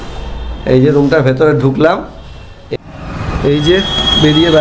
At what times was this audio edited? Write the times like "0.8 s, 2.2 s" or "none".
2.7 s